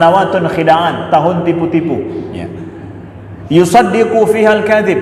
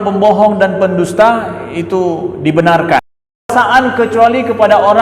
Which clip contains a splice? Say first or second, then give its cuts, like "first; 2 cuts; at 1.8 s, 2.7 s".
second; 1 cut; at 3.5 s